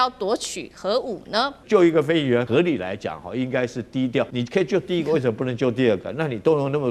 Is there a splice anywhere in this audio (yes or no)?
yes